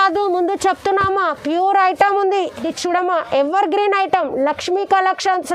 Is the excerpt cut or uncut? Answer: cut